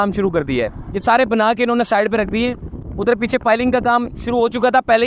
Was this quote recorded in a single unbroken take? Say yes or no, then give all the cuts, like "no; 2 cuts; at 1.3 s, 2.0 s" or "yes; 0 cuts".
yes; 0 cuts